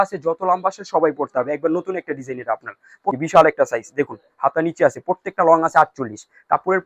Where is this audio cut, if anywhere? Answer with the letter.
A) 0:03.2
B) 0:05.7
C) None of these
A